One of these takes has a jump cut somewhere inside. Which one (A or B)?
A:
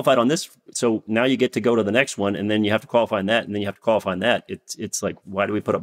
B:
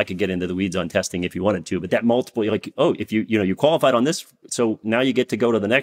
B